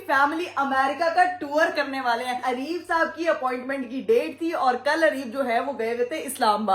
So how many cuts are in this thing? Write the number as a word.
one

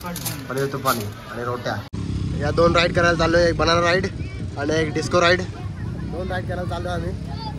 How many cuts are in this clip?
one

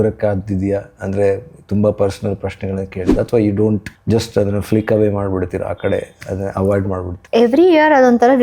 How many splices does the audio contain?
two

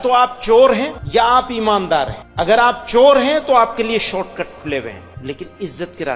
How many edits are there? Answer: three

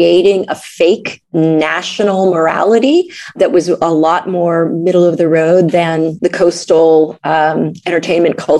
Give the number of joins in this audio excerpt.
three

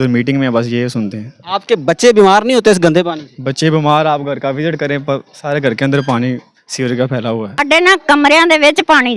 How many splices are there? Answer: one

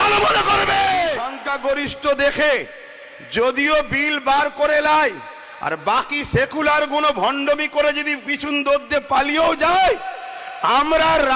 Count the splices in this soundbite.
one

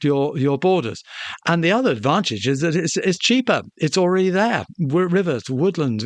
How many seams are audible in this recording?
zero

